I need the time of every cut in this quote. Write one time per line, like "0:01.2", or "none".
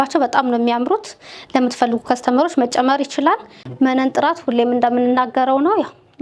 0:03.6